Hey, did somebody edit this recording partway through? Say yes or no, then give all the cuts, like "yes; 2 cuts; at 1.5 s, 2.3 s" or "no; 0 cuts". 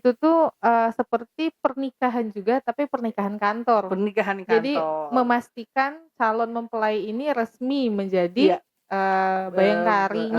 no; 0 cuts